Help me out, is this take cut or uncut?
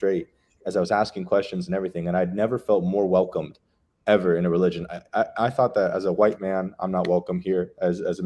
uncut